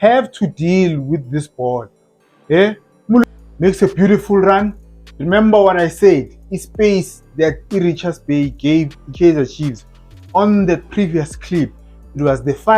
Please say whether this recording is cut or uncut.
cut